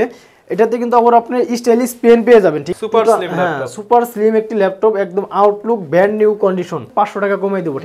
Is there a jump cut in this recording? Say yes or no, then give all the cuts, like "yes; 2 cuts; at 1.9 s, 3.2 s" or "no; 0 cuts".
yes; 2 cuts; at 2.7 s, 6.9 s